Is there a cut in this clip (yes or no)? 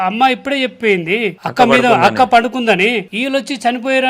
yes